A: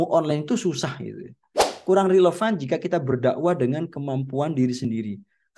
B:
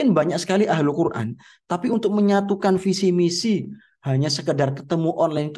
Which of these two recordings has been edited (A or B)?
A